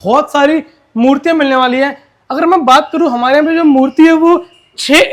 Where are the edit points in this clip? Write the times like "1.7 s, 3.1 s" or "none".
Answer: none